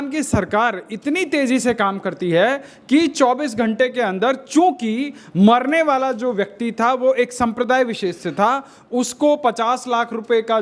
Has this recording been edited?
no; 0 cuts

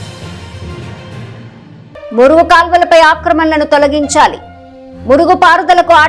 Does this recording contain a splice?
yes; 1 cut; at 1.9 s

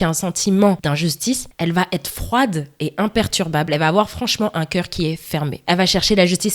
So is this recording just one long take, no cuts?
no; 1 cut; at 1.1 s

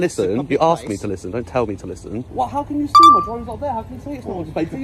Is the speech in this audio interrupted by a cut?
yes; 1 cut; at 2.3 s

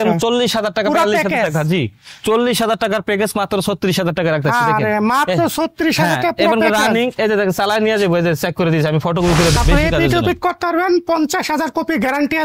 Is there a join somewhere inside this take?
yes; 1 cut; at 9.5 s

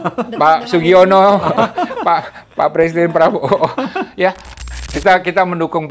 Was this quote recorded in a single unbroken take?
no; 1 cut; at 4.5 s

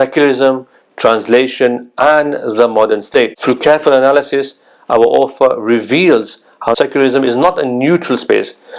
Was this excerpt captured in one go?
no; 2 cuts; at 3.4 s, 6.8 s

